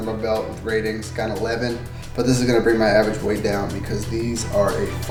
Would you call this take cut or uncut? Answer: uncut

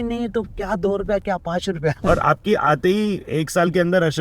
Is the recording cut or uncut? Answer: cut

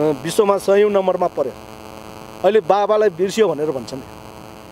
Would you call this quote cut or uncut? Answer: uncut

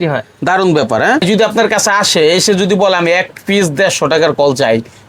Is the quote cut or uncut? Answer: cut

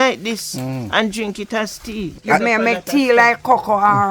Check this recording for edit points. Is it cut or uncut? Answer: cut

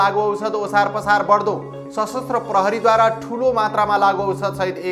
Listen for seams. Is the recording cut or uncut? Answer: uncut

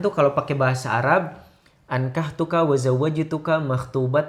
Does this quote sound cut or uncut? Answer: uncut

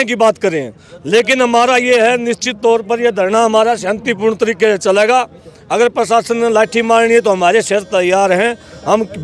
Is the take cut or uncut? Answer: uncut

